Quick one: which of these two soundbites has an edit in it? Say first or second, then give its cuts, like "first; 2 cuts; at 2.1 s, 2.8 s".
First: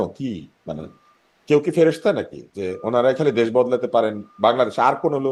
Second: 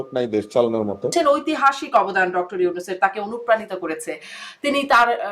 second; 1 cut; at 1.1 s